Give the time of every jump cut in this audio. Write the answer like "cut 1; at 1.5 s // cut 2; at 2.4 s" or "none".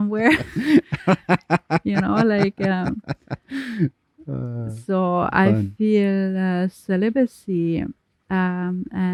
none